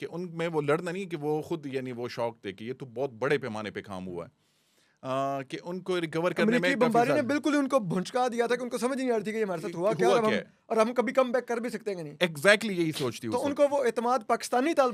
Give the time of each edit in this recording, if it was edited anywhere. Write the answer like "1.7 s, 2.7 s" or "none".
none